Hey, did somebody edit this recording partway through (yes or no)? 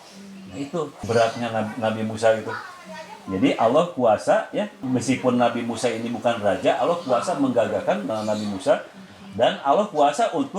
yes